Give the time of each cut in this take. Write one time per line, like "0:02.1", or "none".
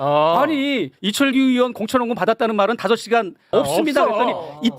0:03.5